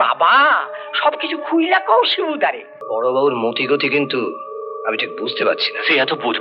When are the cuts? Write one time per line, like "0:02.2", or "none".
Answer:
0:02.7